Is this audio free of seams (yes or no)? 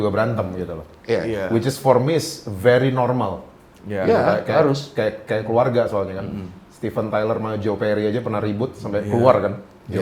yes